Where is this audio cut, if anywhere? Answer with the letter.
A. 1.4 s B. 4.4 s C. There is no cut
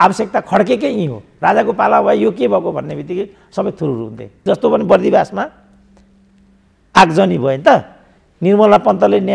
B